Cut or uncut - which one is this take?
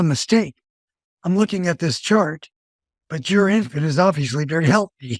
uncut